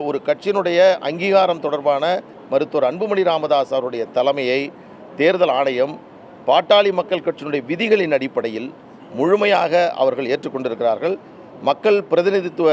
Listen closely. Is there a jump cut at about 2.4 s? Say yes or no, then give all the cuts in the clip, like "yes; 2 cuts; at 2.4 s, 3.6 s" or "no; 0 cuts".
yes; 1 cut; at 2.4 s